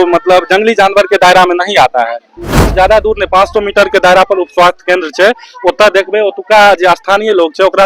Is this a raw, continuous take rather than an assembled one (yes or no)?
no